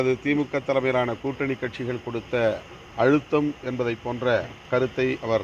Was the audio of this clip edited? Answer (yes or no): yes